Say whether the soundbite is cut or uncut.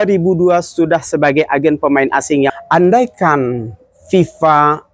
cut